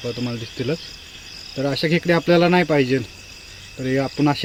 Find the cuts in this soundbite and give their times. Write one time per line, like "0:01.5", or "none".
none